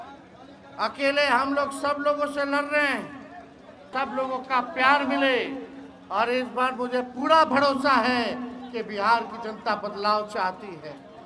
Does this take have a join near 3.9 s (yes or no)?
yes